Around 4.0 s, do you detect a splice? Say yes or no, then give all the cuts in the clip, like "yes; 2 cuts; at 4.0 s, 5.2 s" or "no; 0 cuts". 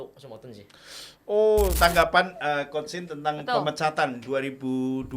no; 1 cut; at 1.8 s